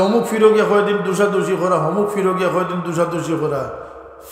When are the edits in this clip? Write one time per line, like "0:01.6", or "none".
none